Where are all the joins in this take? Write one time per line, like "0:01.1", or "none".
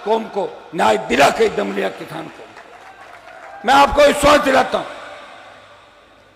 none